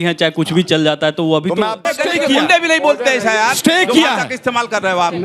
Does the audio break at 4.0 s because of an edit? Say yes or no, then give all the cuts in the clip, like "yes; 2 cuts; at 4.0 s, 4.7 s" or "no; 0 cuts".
no; 1 cut; at 1.8 s